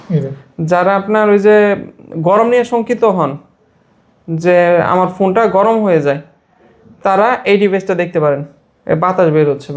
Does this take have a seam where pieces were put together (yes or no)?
no